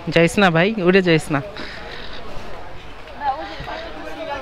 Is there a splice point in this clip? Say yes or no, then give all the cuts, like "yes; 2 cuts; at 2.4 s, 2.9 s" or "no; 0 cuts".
no; 0 cuts